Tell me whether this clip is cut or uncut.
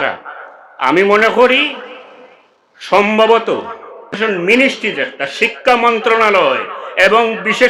cut